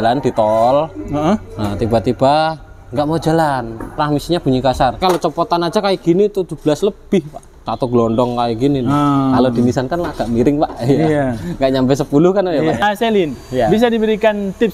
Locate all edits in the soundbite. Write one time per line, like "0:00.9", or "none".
0:03.9
0:05.0
0:07.7
0:12.8